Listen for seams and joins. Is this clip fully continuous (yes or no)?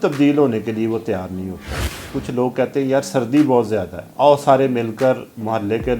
no